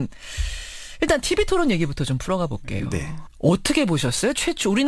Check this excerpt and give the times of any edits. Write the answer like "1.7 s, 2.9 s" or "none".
1.6 s